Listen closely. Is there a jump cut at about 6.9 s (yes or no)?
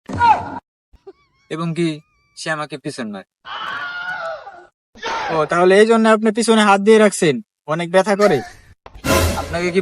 no